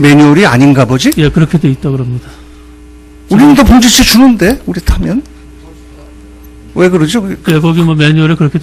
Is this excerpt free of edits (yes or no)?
yes